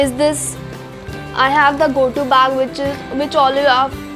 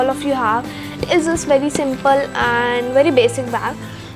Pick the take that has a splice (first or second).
second